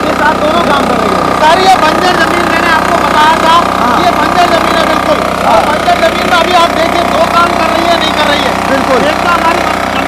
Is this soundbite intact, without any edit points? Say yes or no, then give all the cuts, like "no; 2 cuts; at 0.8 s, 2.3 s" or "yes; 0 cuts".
yes; 0 cuts